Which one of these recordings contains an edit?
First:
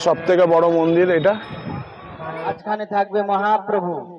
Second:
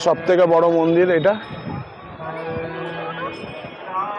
first; 1 cut; at 2.6 s

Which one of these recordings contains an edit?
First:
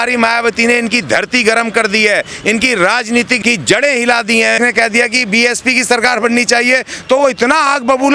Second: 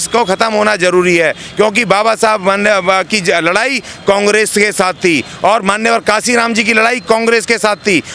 first; 2 cuts; at 3.3 s, 4.6 s

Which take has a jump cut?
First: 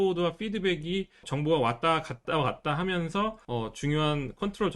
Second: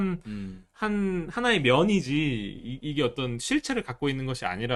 first; 3 cuts; at 1.3 s, 2.2 s, 3.4 s

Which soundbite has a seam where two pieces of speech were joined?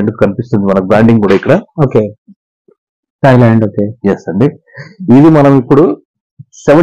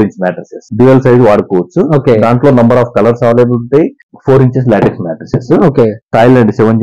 second; 1 cut; at 4.1 s

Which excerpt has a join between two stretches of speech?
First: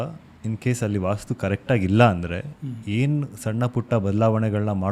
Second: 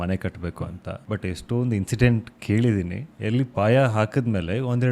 second; 2 cuts; at 0.9 s, 3.0 s

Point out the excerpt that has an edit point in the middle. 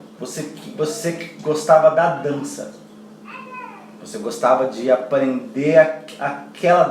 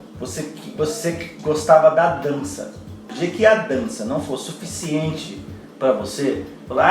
second; 1 cut; at 3.0 s

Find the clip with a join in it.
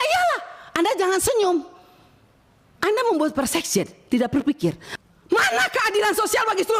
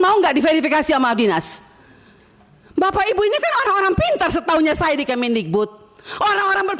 first; 1 cut; at 4.9 s

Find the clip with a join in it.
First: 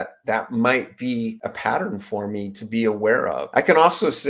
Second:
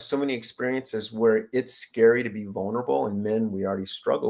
first; 2 cuts; at 1.5 s, 3.4 s

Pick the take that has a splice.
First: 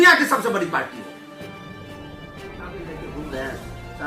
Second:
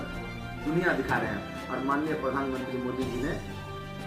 first; 2 cuts; at 1.1 s, 2.4 s

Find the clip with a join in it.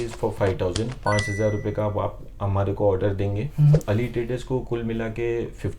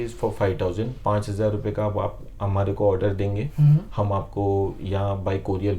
first; 1 cut; at 3.8 s

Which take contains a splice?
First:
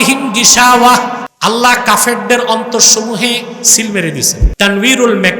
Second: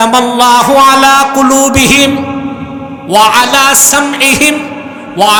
first; 2 cuts; at 1.3 s, 4.5 s

